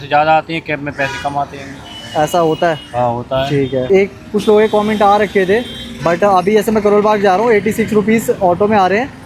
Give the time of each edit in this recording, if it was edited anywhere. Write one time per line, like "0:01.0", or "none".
none